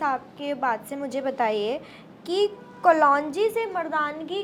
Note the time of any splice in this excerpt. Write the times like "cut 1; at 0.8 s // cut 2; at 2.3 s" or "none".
none